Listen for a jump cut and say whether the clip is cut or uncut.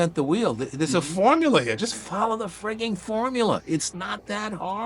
uncut